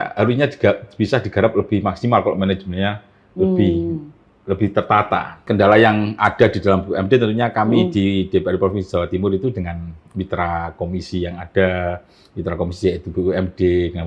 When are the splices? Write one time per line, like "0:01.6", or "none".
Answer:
0:05.4